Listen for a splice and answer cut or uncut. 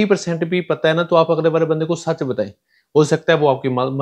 uncut